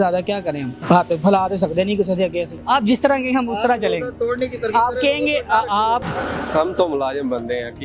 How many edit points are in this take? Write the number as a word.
two